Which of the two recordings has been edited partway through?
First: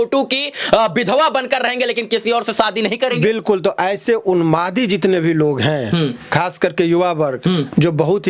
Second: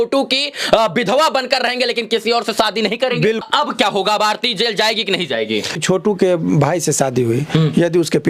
second; 2 cuts; at 3.4 s, 5.8 s

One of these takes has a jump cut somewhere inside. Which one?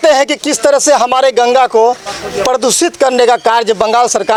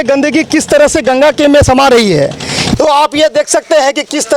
second; 1 cut; at 2.8 s

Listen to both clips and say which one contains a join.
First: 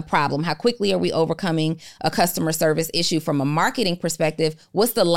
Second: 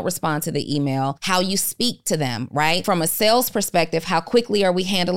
second; 2 cuts; at 1.2 s, 2.8 s

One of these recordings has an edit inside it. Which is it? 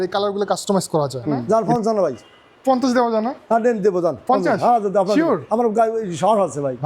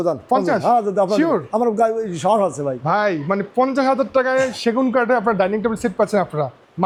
first; 1 cut; at 1.4 s

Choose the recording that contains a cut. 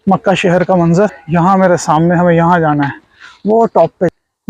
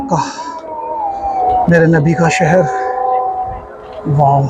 first; 1 cut; at 1.2 s

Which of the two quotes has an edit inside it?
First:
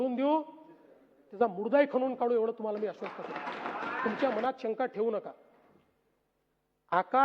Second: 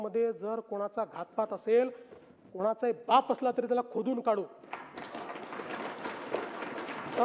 first; 1 cut; at 4.0 s

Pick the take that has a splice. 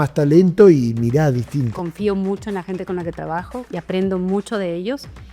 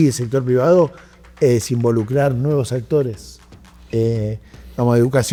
first; 1 cut; at 1.8 s

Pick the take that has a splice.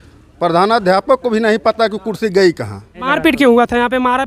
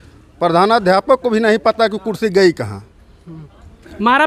first; 1 cut; at 3.1 s

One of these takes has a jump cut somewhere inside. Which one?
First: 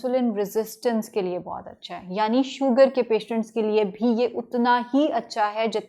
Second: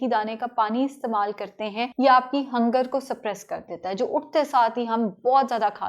second; 1 cut; at 1.9 s

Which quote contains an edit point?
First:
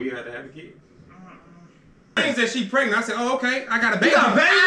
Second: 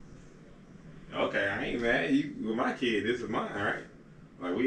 first; 1 cut; at 2.2 s

